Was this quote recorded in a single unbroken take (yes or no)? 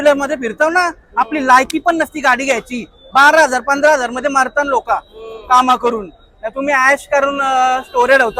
yes